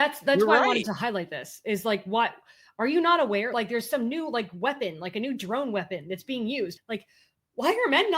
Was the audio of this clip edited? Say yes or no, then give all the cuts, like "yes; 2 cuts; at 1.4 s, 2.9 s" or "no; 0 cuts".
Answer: yes; 2 cuts; at 3.5 s, 6.8 s